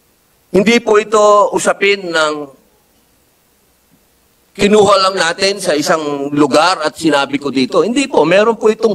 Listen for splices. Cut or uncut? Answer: uncut